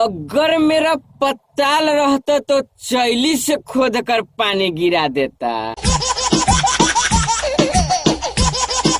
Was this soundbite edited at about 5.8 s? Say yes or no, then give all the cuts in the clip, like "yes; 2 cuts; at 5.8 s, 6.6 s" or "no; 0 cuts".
yes; 2 cuts; at 5.8 s, 8.0 s